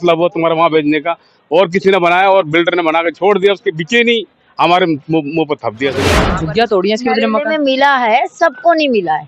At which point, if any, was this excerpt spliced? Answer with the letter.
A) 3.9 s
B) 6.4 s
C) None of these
B